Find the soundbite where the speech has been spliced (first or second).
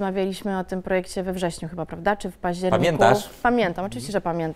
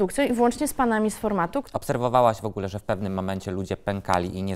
second